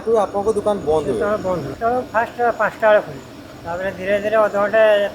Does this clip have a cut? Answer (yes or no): yes